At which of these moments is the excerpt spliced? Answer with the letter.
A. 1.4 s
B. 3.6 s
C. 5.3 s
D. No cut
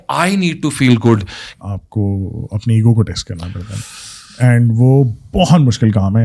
A